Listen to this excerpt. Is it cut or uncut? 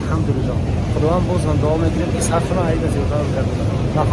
uncut